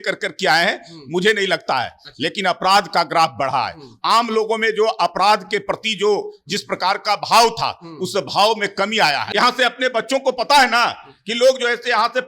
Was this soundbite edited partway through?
yes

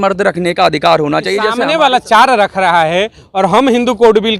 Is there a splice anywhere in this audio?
yes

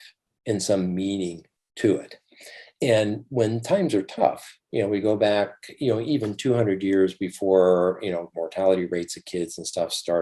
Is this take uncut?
yes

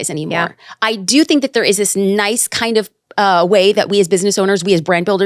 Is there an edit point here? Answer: no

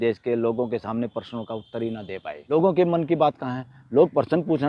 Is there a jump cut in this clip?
yes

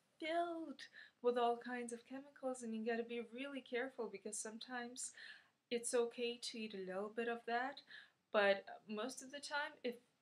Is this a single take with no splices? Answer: yes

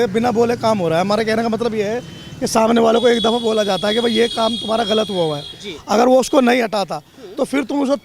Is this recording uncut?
yes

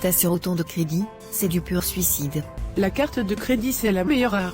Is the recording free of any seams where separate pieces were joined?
no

